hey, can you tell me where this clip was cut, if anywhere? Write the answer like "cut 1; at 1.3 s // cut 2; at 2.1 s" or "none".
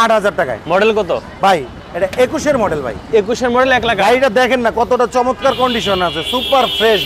none